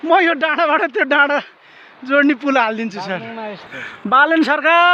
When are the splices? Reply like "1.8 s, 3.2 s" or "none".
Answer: 3.6 s